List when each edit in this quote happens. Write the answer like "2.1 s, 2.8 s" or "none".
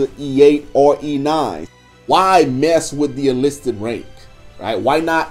1.9 s